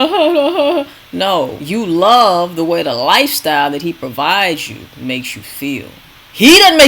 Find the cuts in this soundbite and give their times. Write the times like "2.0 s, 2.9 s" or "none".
1.6 s